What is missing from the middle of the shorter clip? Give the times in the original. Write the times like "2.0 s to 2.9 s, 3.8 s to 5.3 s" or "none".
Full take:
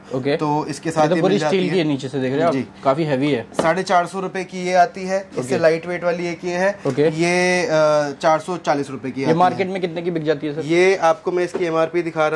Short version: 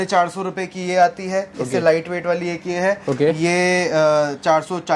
none